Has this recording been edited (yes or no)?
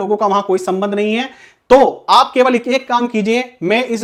no